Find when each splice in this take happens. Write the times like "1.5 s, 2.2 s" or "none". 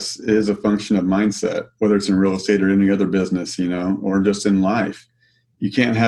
none